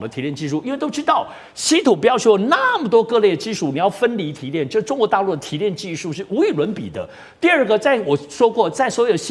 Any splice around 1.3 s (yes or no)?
no